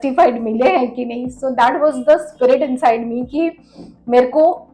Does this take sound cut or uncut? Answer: uncut